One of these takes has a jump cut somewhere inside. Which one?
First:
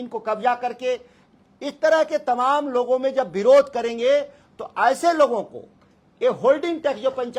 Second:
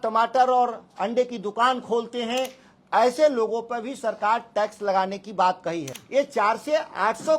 second; 1 cut; at 6.0 s

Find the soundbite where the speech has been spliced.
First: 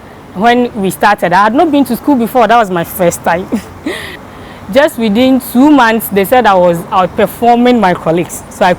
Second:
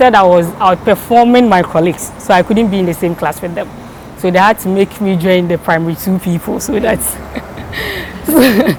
first; 1 cut; at 4.2 s

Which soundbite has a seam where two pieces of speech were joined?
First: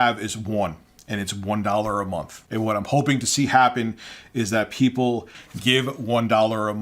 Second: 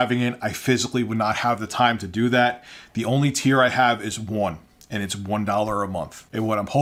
first; 1 cut; at 5.4 s

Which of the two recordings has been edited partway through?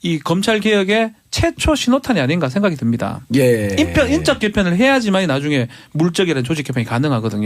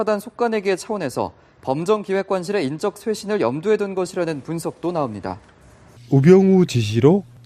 first; 1 cut; at 5.7 s

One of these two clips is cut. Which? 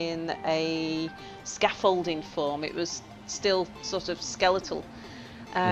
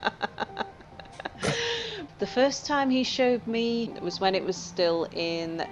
second; 2 cuts; at 2.0 s, 3.9 s

